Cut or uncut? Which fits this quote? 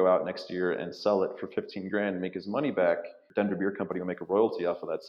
cut